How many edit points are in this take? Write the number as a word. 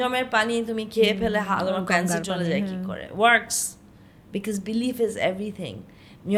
zero